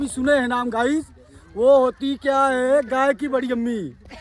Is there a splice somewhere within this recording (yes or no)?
no